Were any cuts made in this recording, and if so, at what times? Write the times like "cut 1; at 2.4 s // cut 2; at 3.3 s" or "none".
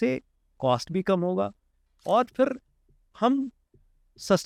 none